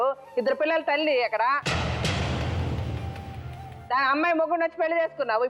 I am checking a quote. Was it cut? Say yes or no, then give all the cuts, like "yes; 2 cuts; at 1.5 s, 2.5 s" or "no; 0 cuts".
no; 0 cuts